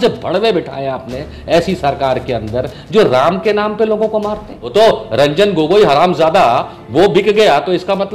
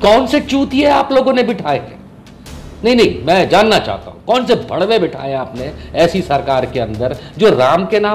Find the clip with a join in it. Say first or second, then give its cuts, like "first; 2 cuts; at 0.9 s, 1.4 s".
first; 1 cut; at 4.7 s